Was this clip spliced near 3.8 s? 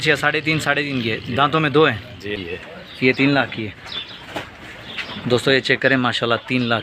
no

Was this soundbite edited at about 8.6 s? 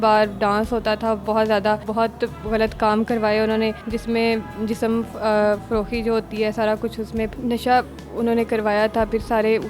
no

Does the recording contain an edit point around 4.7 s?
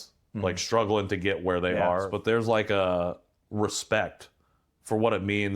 no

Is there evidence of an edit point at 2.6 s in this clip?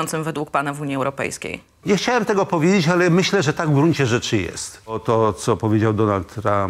no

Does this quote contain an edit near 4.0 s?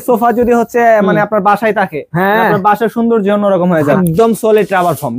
yes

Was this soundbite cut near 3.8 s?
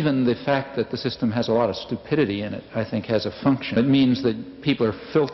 yes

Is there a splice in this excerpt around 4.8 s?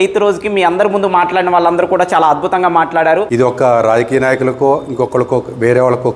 no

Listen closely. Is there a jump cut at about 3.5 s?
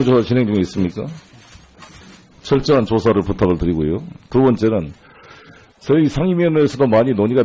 no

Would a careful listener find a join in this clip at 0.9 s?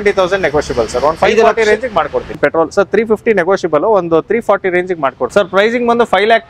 no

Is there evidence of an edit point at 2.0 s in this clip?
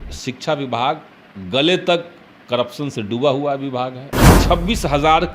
no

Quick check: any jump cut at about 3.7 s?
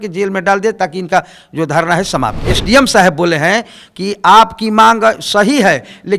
no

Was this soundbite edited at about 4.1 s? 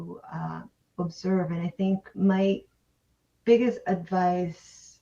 no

